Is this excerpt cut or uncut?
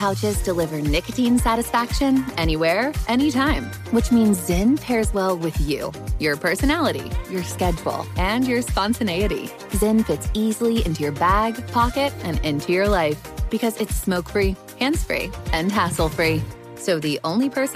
uncut